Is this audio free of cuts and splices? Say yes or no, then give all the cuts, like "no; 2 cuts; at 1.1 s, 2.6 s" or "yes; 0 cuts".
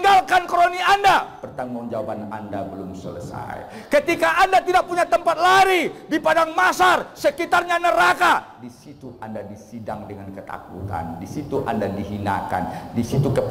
yes; 0 cuts